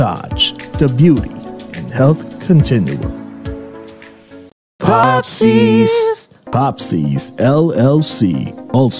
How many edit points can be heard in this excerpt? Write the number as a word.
one